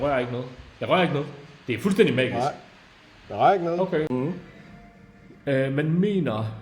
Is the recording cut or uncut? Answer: cut